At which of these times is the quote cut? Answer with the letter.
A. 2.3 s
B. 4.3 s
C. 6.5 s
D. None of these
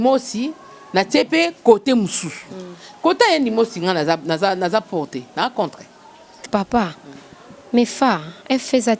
C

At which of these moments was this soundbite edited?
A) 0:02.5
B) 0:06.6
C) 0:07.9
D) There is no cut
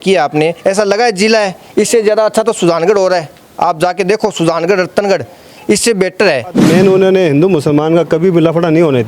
B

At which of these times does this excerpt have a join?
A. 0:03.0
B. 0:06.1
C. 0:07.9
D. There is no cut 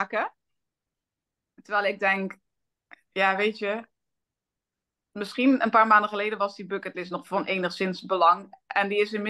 D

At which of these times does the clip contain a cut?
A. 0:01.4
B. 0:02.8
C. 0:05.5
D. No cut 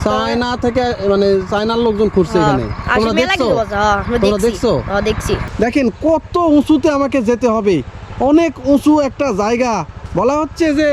C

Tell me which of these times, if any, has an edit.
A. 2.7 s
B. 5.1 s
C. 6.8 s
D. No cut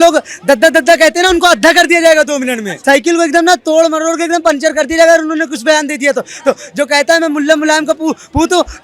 A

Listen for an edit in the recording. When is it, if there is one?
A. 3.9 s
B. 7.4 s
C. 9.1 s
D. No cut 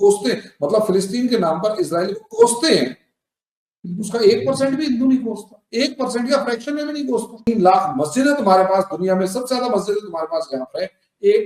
B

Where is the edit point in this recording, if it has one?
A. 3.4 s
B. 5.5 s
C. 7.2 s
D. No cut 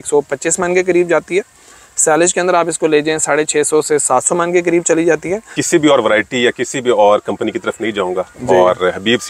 B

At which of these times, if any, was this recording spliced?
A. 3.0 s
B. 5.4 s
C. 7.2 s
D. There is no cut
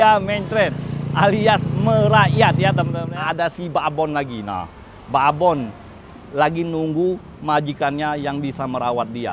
A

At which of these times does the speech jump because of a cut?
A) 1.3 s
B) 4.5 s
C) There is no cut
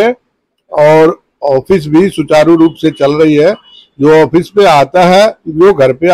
C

